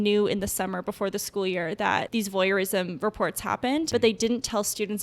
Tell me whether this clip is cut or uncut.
cut